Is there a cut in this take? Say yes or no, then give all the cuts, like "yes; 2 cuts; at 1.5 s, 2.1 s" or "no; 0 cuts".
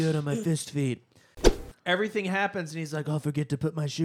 yes; 1 cut; at 1.4 s